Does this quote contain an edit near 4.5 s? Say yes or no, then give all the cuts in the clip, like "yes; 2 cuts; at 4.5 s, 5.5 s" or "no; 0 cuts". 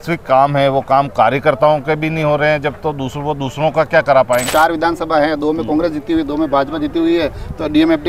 yes; 1 cut; at 4.5 s